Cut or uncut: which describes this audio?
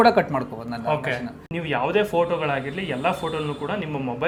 uncut